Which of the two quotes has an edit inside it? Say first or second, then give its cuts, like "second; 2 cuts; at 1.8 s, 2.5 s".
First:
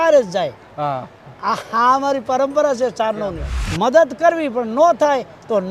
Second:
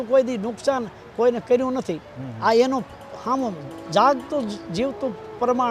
first; 1 cut; at 3.6 s